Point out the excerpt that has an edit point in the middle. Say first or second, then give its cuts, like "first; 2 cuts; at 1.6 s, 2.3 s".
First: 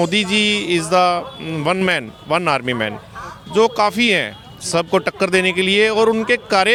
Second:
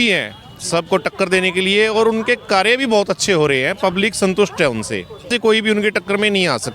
second; 1 cut; at 5.3 s